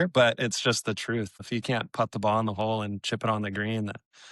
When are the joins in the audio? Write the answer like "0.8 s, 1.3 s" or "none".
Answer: 1.4 s